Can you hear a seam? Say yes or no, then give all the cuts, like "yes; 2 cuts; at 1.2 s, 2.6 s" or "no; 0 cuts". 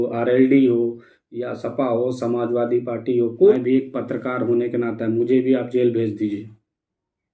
yes; 1 cut; at 3.5 s